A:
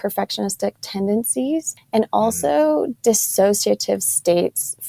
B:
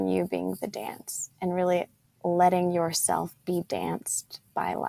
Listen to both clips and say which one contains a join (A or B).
A